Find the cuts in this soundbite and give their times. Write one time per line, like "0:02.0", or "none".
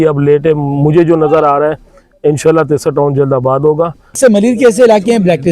0:04.2